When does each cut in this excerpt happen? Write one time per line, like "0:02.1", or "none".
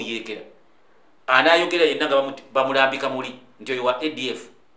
none